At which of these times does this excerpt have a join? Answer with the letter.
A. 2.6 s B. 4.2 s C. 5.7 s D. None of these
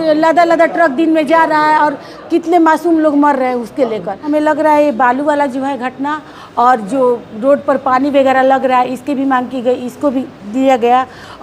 B